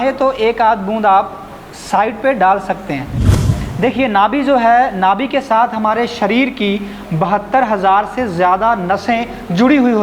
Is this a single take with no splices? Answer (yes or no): no